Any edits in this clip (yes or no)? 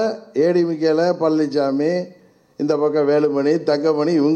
no